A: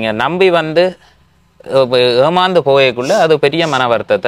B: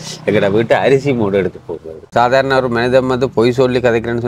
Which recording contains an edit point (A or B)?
B